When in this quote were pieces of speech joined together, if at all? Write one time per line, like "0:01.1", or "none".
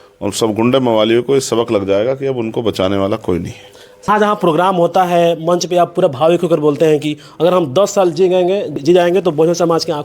0:04.1
0:08.8